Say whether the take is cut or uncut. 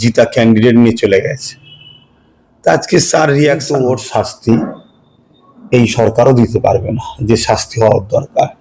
cut